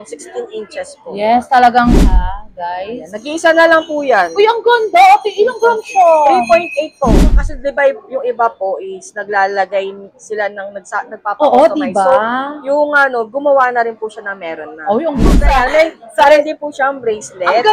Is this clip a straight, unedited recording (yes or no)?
no